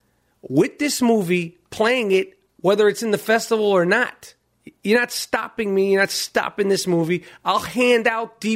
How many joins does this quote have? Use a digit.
0